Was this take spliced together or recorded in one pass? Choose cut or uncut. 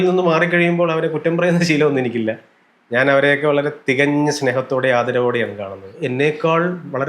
cut